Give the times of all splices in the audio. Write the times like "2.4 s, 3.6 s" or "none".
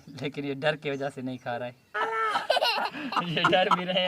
1.8 s